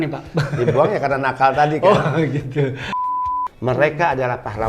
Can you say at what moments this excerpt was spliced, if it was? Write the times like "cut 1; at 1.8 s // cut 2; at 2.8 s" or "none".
cut 1; at 2.9 s